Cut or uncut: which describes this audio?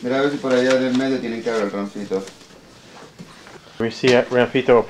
cut